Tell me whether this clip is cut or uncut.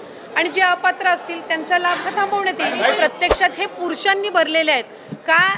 cut